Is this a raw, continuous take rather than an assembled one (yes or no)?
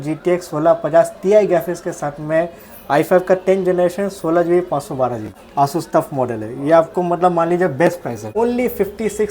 no